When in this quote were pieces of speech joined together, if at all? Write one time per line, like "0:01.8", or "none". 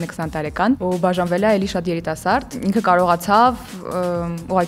0:00.8
0:02.5

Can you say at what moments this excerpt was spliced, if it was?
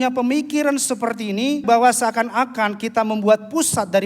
0:01.6

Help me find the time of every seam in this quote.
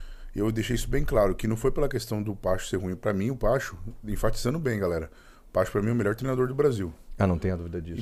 none

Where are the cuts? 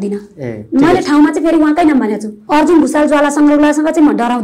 0:02.3

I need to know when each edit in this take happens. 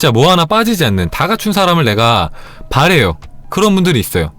0:03.3

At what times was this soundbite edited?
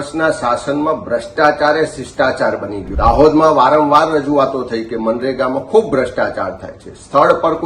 0:02.8

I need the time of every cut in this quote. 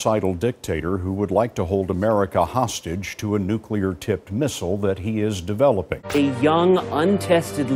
0:06.1

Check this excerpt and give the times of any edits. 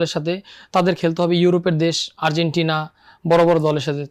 none

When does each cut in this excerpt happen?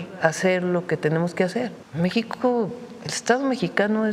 0:01.8

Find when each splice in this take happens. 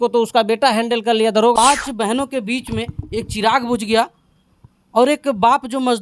0:01.5

